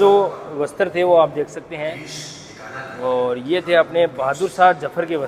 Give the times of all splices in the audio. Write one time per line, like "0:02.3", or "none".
none